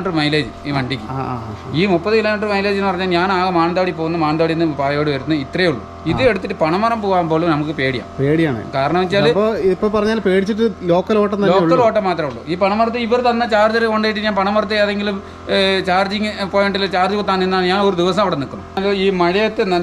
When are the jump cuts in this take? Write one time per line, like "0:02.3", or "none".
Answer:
0:18.8